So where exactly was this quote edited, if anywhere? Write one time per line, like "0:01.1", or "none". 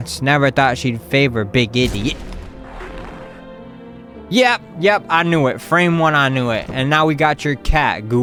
none